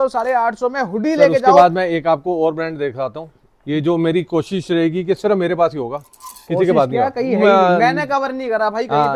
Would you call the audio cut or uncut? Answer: uncut